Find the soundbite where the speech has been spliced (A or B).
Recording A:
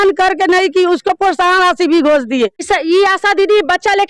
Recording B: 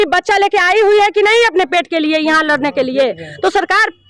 A